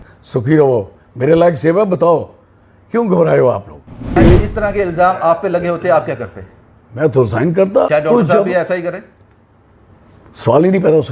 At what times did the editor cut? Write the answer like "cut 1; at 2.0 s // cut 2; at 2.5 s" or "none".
cut 1; at 4.2 s // cut 2; at 7.9 s